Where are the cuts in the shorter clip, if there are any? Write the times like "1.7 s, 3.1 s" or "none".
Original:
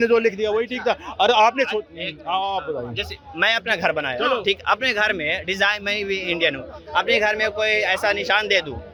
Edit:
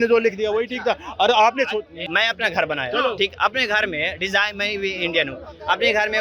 2.0 s